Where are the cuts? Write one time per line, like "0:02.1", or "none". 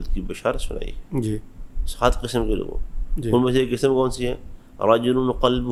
none